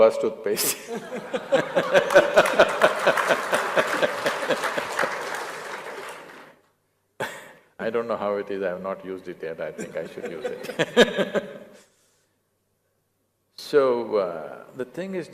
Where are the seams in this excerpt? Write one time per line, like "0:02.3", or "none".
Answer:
0:04.2

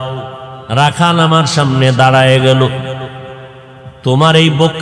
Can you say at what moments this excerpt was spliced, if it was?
none

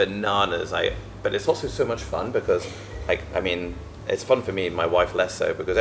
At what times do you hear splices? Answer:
none

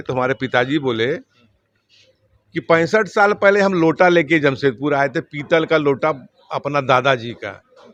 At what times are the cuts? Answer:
none

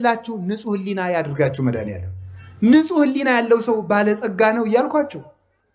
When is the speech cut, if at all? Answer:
none

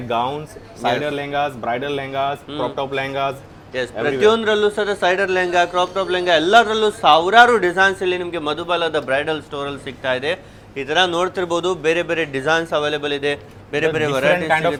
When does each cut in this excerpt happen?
none

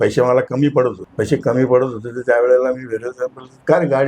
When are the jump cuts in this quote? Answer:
0:01.0

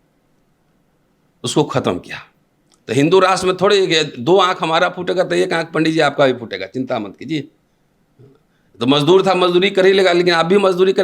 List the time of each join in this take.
none

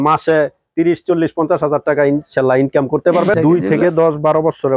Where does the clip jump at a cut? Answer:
0:03.3

